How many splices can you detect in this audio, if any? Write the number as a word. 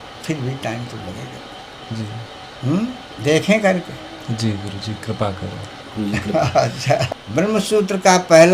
one